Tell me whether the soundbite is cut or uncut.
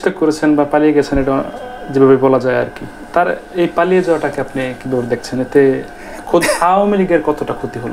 uncut